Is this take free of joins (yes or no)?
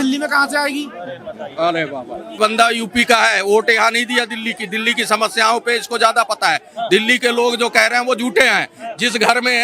no